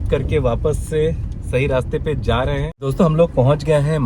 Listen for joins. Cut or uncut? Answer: cut